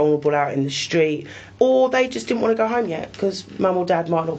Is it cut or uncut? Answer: cut